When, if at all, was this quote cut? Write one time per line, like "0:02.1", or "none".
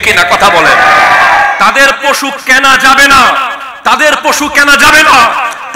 none

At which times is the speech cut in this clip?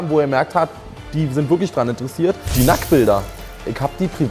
0:02.5

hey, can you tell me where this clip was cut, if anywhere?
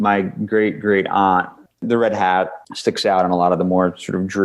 0:01.6

